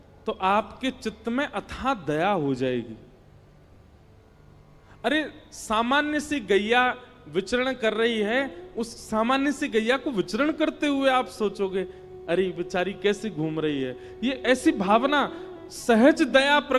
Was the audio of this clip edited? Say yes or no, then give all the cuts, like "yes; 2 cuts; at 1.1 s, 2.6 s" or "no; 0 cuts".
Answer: no; 0 cuts